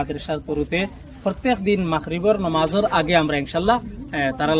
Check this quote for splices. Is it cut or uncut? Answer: uncut